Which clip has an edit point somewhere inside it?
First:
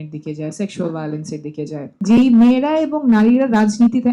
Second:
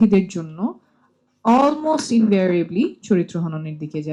first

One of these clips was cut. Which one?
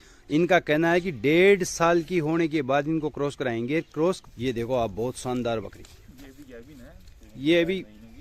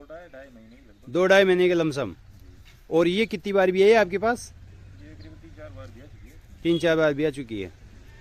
first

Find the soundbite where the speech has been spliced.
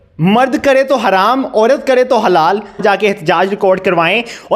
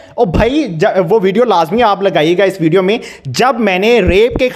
first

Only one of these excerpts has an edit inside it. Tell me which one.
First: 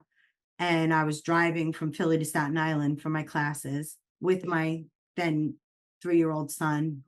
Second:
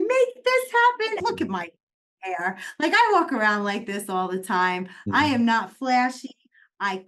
second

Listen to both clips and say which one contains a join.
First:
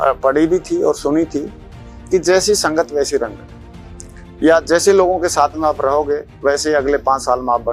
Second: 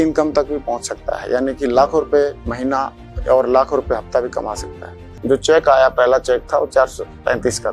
second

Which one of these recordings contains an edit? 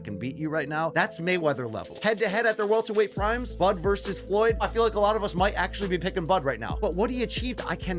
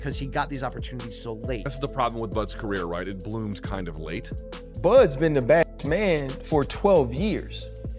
second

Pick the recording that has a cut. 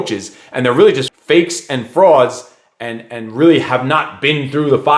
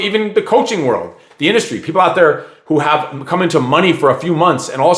first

